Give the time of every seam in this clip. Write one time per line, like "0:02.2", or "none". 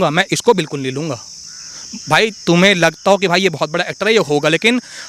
none